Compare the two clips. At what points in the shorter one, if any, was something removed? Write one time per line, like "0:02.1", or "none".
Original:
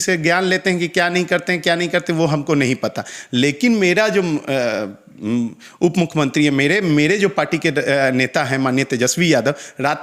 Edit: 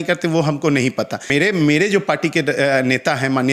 0:01.3